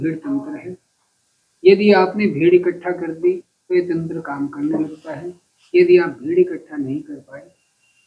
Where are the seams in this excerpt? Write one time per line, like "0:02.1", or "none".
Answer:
none